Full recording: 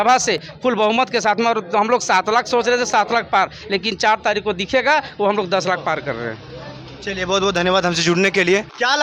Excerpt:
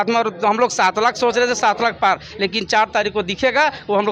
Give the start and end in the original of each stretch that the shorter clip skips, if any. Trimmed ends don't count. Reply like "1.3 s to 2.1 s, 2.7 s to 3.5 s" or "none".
none